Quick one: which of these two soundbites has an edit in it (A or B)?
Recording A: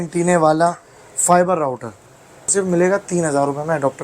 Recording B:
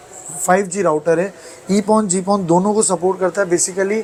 A